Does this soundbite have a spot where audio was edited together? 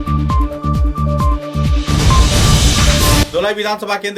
no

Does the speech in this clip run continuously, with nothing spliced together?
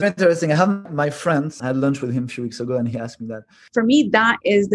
no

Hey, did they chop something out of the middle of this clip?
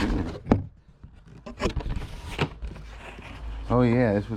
no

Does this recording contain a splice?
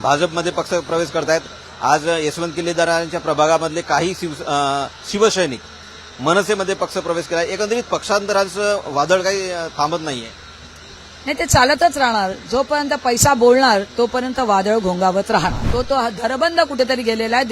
yes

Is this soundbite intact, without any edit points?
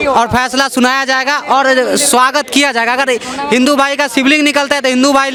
yes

